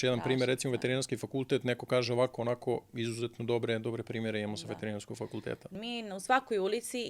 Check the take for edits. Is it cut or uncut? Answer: cut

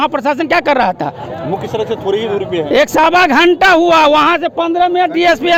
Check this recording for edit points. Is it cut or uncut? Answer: uncut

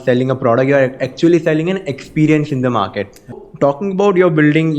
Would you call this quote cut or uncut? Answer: cut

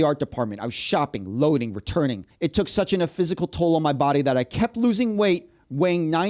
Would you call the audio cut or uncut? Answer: cut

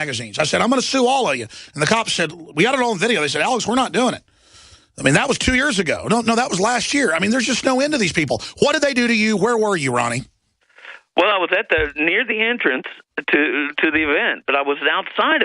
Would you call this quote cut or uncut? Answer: cut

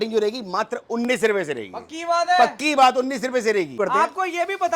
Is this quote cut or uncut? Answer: cut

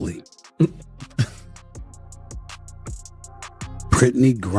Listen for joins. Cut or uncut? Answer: cut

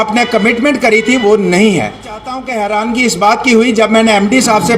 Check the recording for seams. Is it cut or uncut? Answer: cut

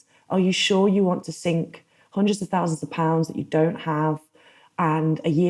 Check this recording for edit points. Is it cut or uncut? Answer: uncut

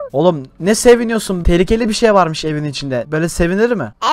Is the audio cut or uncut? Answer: uncut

